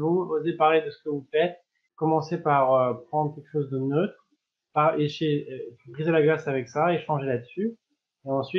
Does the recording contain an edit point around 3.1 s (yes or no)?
no